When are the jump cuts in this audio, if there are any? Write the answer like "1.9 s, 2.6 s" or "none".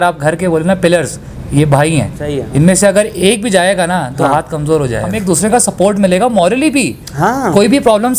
2.4 s, 5.1 s